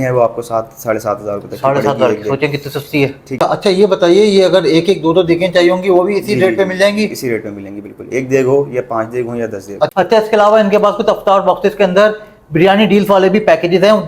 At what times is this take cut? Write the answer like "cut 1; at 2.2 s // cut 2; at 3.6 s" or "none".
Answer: cut 1; at 3.3 s // cut 2; at 9.9 s